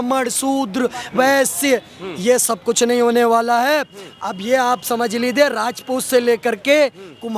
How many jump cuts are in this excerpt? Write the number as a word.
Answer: zero